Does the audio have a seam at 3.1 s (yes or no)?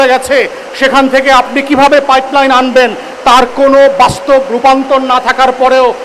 no